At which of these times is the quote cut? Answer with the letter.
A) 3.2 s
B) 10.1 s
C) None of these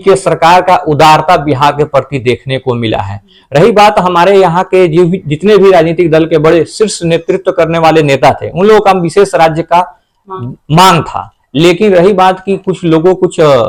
C